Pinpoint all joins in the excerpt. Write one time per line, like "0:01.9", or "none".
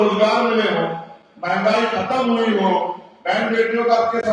none